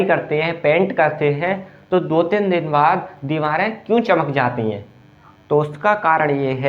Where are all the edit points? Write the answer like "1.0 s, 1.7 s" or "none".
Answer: none